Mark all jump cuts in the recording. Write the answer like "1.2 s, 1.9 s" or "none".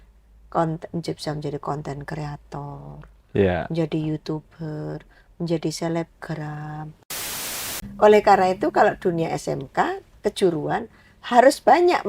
7.3 s